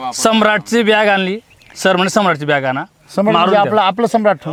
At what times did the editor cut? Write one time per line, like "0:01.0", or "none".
none